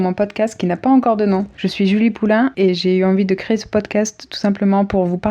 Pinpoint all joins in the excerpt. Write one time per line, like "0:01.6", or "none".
0:01.6
0:02.7